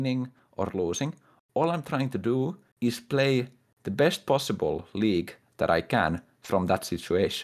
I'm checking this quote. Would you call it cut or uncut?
uncut